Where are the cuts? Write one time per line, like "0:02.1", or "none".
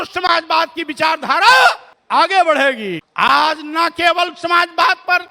0:01.9
0:03.0